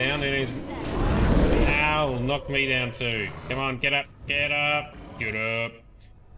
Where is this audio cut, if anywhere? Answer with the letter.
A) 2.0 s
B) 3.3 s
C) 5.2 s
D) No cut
D